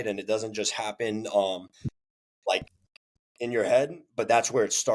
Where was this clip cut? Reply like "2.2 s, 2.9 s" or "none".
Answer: none